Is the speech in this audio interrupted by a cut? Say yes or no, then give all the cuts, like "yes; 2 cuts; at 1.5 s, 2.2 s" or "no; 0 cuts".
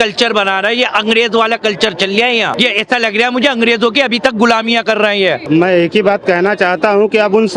yes; 2 cuts; at 2.5 s, 5.4 s